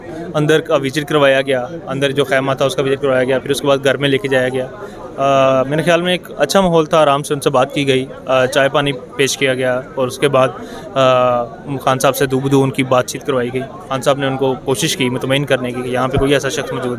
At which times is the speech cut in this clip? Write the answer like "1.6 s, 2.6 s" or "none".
none